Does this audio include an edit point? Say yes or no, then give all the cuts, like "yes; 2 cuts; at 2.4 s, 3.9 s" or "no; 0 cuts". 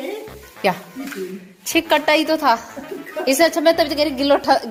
no; 0 cuts